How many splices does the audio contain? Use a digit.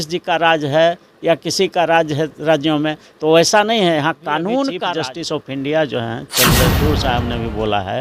1